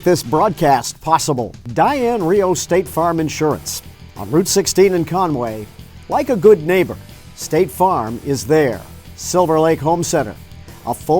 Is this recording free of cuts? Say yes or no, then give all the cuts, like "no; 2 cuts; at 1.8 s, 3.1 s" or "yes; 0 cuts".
no; 1 cut; at 1.5 s